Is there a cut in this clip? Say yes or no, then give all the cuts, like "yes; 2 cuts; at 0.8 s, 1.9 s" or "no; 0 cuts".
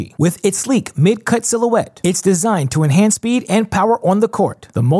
no; 0 cuts